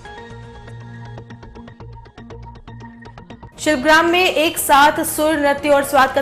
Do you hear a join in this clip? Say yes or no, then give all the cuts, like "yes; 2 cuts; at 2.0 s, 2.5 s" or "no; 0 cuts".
yes; 1 cut; at 3.3 s